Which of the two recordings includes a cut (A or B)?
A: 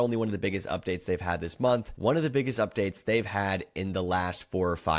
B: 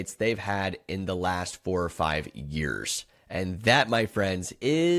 A